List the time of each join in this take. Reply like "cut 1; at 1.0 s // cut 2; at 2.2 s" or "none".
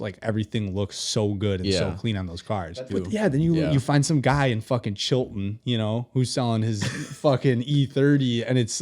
cut 1; at 2.7 s